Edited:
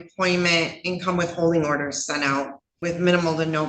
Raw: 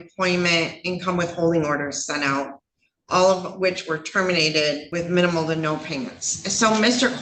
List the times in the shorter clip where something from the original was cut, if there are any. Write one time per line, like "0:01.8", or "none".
0:02.8